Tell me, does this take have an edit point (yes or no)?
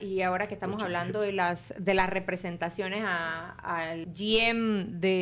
yes